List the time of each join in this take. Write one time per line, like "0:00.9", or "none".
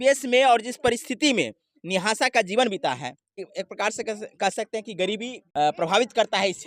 0:03.4
0:05.4